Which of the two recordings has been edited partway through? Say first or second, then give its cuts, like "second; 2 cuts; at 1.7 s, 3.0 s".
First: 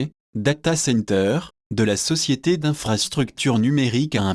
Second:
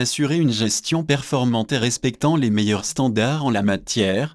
first; 1 cut; at 1.5 s